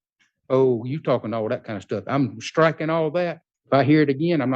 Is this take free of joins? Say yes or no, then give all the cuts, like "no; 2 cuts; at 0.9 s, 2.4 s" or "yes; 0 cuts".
no; 1 cut; at 3.5 s